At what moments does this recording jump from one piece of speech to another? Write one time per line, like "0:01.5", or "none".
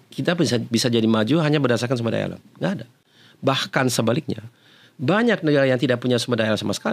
none